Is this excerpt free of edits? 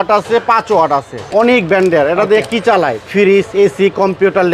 no; 1 cut; at 1.2 s

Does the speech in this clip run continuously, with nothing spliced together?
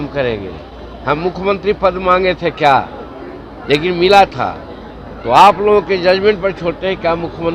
yes; 0 cuts

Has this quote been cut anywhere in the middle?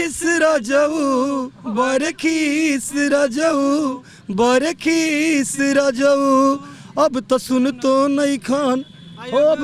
no; 0 cuts

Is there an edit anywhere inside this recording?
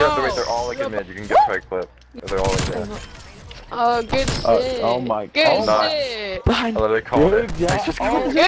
no; 0 cuts

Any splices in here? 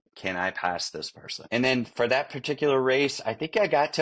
yes; 1 cut; at 1.4 s

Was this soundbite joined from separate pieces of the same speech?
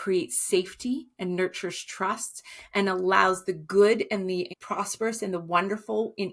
no; 0 cuts

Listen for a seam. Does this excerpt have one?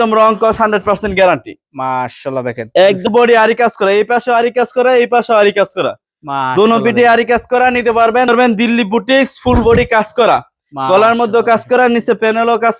yes; 2 cuts; at 3.1 s, 8.3 s

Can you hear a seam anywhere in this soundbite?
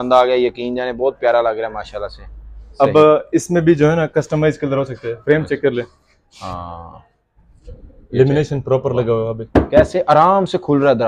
no; 0 cuts

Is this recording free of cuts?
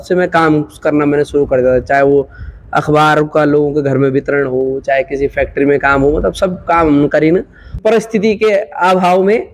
no; 1 cut; at 7.7 s

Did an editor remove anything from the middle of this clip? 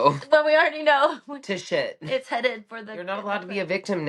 yes; 1 cut; at 3.1 s

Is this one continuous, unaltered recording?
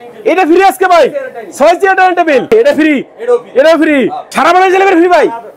no; 2 cuts; at 2.5 s, 4.2 s

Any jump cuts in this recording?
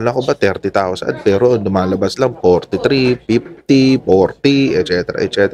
no; 0 cuts

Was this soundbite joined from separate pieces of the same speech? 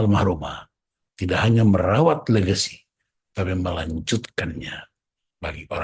no; 0 cuts

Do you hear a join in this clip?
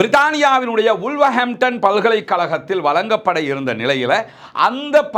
no; 0 cuts

